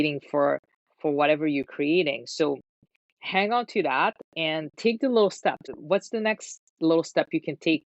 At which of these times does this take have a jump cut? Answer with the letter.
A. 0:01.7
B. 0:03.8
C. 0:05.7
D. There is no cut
C